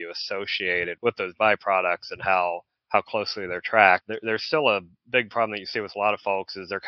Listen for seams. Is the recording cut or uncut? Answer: cut